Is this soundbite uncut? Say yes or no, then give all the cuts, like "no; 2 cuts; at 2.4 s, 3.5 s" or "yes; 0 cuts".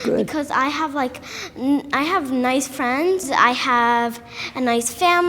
no; 1 cut; at 3.3 s